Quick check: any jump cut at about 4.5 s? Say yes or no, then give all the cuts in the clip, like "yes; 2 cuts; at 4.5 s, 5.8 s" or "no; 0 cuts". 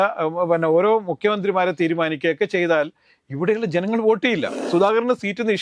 yes; 1 cut; at 4.5 s